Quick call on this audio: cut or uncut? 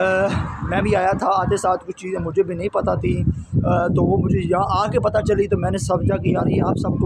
uncut